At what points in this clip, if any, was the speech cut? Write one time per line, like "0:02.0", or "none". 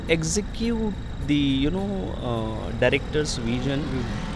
none